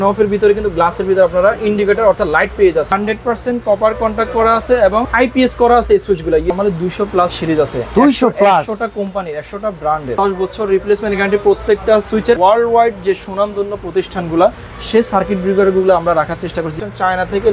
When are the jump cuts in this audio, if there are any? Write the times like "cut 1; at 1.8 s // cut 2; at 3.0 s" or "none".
cut 1; at 2.9 s // cut 2; at 5.1 s // cut 3; at 6.5 s // cut 4; at 10.1 s // cut 5; at 12.4 s // cut 6; at 16.7 s